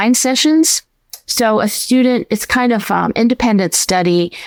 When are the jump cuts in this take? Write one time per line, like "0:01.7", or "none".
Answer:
none